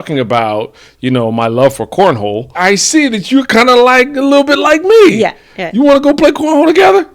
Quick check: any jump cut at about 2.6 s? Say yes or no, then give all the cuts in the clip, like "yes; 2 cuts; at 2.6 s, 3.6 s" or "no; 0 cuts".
yes; 1 cut; at 2.6 s